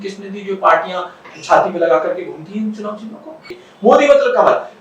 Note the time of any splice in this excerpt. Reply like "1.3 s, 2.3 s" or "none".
3.5 s